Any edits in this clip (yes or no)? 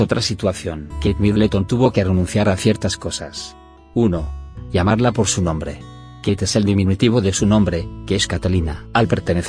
yes